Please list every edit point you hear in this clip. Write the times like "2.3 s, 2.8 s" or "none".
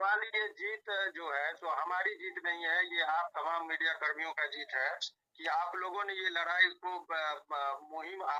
none